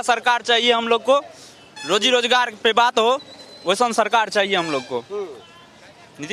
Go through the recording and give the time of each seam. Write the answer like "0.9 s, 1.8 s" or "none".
none